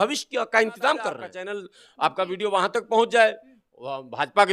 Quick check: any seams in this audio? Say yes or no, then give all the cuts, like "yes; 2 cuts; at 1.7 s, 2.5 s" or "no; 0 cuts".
yes; 1 cut; at 1.3 s